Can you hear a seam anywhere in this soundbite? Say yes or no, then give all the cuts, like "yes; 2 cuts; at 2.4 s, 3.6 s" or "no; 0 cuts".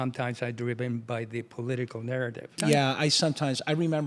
yes; 1 cut; at 2.6 s